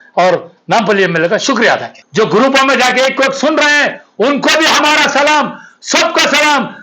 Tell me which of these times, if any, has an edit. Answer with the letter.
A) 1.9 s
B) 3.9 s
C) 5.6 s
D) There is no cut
A